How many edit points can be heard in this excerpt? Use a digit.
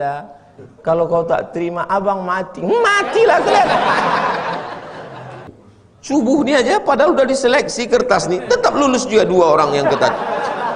1